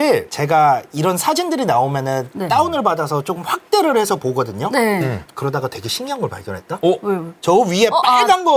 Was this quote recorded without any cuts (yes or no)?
no